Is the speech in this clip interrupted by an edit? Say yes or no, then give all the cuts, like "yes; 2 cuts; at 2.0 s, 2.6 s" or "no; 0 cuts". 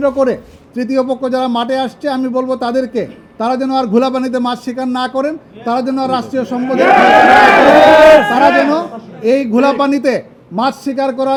no; 0 cuts